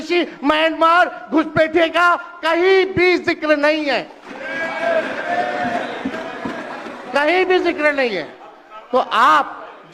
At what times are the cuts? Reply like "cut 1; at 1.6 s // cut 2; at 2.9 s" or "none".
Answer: none